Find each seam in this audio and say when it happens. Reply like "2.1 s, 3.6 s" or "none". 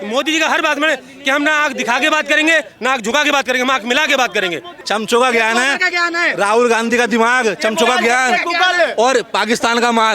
4.7 s